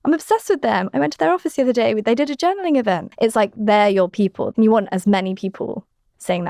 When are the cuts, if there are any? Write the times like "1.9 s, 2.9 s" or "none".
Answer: 3.1 s, 4.5 s